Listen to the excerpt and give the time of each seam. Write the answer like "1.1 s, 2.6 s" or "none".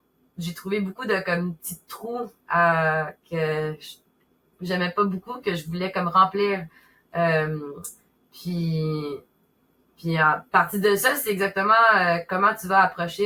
none